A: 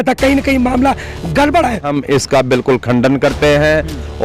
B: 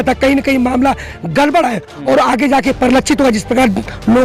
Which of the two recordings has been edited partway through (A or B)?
A